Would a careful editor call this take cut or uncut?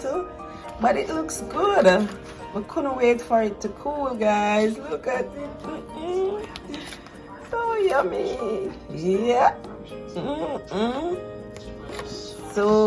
uncut